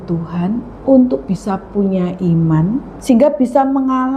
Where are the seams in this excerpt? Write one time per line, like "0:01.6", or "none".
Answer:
0:02.9